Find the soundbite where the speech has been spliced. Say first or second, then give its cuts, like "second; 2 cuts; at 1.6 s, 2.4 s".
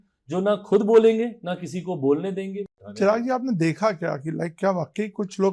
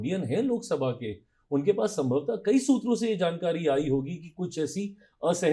first; 1 cut; at 2.8 s